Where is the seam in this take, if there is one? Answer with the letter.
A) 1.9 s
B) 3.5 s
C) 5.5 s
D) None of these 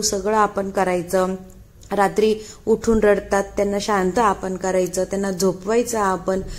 D